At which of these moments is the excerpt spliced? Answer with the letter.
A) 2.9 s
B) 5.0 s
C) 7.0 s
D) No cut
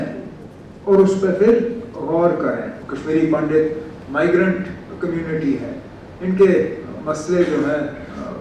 A